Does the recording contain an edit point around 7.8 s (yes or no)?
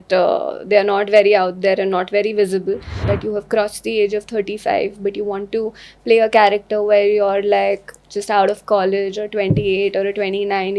no